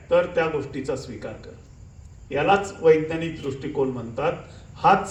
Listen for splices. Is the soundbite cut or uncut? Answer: uncut